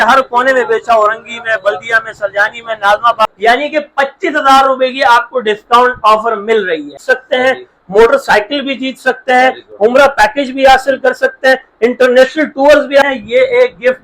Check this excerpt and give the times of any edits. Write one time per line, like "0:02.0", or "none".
0:03.2
0:06.9
0:13.0